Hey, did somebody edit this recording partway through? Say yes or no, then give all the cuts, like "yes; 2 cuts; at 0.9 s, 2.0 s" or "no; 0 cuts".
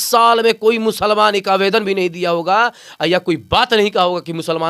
no; 0 cuts